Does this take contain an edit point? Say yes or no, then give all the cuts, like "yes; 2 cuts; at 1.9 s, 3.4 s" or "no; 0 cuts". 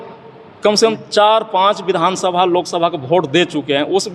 no; 0 cuts